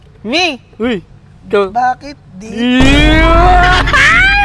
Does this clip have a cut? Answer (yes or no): no